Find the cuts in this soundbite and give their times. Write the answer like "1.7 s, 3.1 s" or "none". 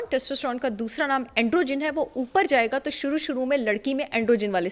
none